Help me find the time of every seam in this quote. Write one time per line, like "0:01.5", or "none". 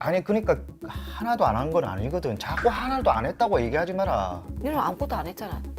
0:04.5